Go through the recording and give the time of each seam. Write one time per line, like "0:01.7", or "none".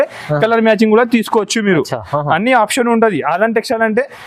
none

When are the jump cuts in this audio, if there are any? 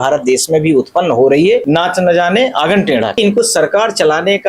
0:01.6
0:03.2

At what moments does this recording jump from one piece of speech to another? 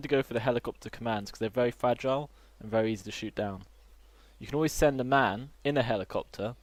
none

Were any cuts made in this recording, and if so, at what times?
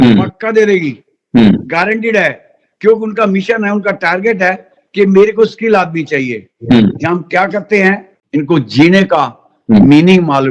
0:08.2

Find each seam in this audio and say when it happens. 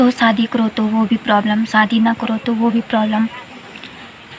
none

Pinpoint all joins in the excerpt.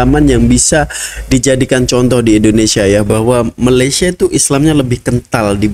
0:03.1

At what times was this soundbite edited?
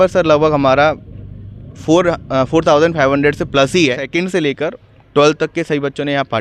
0:04.1

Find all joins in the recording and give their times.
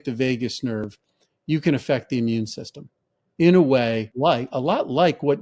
0:04.1

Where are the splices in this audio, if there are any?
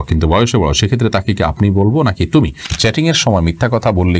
0:02.7

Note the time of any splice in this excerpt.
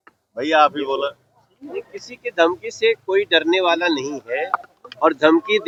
none

